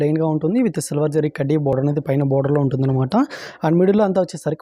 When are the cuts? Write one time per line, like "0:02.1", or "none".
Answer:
none